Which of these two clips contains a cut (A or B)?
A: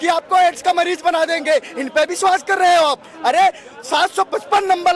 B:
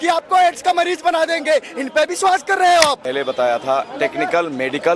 B